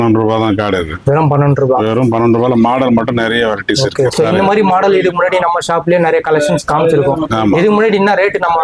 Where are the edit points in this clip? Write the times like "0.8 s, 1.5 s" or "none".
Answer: none